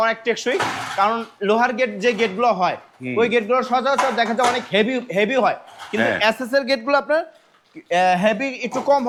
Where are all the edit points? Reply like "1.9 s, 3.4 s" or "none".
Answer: none